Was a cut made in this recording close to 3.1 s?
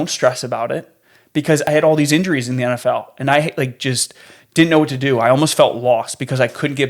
no; 1 cut; at 1.6 s

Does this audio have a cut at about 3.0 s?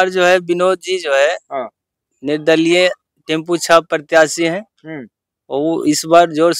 no; 0 cuts

